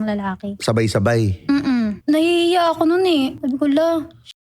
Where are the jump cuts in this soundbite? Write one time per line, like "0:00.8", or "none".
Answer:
0:02.0
0:03.4